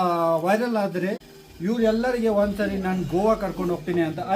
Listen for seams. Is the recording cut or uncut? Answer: cut